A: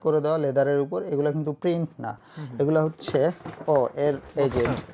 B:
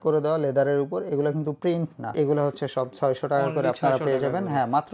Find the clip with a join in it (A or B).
B